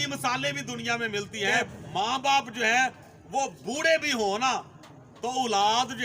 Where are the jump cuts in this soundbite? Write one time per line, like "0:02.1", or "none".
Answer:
0:01.8